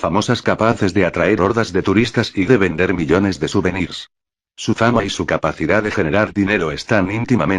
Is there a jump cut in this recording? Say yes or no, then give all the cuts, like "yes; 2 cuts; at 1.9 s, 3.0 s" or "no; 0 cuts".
yes; 1 cut; at 6.4 s